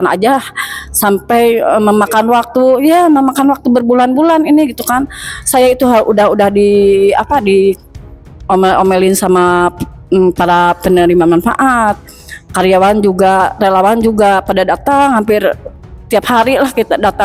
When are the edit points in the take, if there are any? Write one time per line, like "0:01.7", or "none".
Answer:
none